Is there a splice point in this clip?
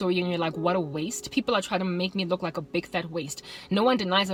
no; 0 cuts

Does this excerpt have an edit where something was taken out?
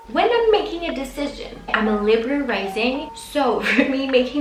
no; 0 cuts

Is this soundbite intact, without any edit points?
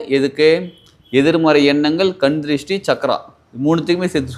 yes; 0 cuts

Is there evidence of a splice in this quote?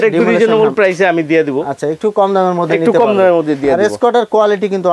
no; 0 cuts

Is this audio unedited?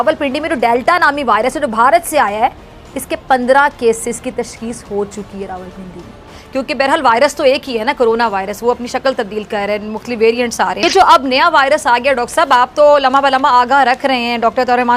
yes; 0 cuts

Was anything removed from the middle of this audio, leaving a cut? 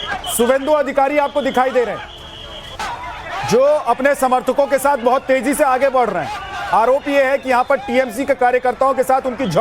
no; 0 cuts

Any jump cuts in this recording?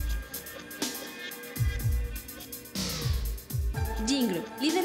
yes; 1 cut; at 1.1 s

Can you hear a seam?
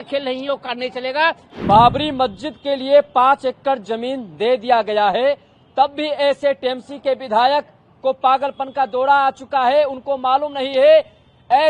yes; 1 cut; at 1.5 s

